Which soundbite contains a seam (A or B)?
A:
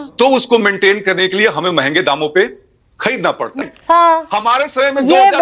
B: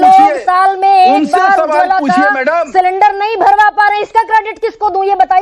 A